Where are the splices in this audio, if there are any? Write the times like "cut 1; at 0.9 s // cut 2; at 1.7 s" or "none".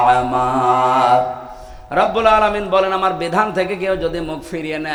none